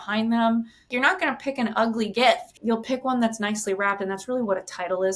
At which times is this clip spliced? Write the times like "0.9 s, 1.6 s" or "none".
0.9 s, 2.5 s